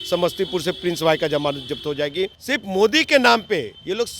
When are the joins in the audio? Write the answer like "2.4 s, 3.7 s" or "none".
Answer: 2.4 s